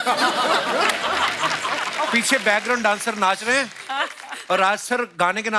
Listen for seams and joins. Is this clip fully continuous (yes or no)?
yes